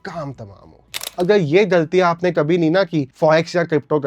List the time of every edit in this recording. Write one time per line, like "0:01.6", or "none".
0:01.1